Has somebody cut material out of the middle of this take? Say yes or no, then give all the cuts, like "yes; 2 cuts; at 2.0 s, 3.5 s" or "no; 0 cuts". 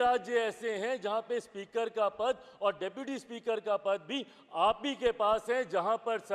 no; 0 cuts